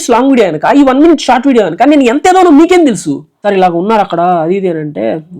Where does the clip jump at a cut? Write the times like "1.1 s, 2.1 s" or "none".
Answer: 3.3 s